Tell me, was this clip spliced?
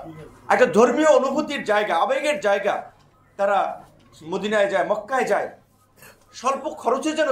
no; 0 cuts

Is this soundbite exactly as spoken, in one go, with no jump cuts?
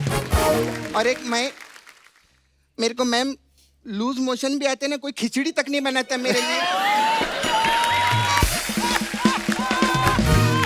yes; 0 cuts

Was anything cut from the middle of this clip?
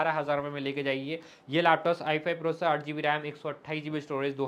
no; 0 cuts

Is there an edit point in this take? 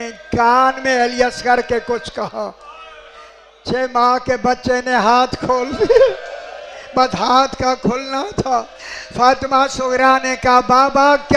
no; 0 cuts

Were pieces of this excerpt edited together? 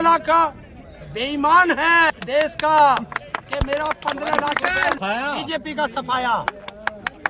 yes; 2 cuts; at 2.1 s, 5.0 s

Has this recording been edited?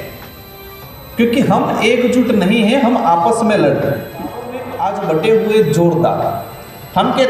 yes; 1 cut; at 4.6 s

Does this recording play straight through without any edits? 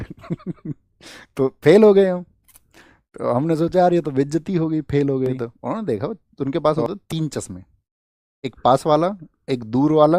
no; 1 cut; at 5.6 s

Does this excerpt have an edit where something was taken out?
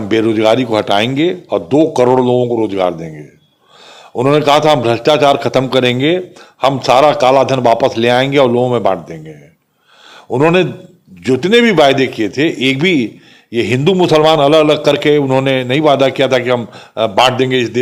no; 0 cuts

